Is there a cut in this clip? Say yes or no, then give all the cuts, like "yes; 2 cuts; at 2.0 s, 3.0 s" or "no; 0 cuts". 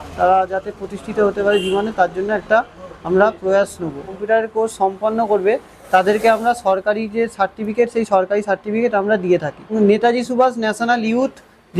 yes; 2 cuts; at 4.2 s, 9.7 s